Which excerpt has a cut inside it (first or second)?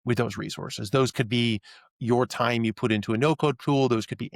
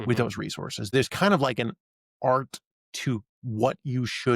second